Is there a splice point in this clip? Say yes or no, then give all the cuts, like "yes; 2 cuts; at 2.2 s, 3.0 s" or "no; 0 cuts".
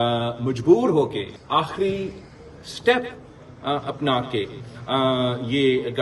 yes; 1 cut; at 1.3 s